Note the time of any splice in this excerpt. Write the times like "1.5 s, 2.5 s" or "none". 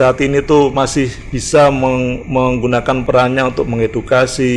3.0 s